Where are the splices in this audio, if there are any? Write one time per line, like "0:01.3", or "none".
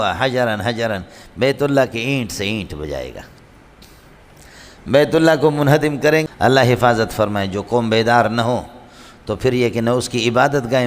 0:06.2

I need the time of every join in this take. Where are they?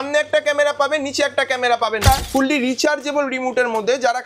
0:02.0

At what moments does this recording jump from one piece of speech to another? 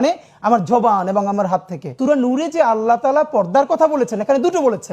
0:01.9

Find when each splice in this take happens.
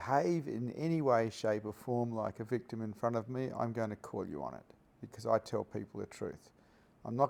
none

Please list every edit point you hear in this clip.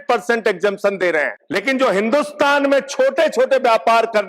0:01.4

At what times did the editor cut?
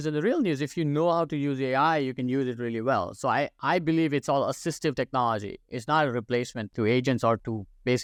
none

